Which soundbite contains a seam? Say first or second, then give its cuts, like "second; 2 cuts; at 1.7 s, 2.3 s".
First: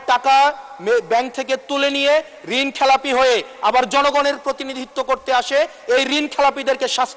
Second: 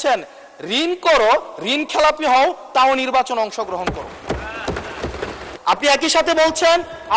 second; 1 cut; at 5.4 s